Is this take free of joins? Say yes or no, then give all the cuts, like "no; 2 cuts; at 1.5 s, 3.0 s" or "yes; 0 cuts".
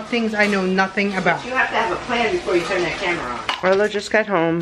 no; 1 cut; at 3.3 s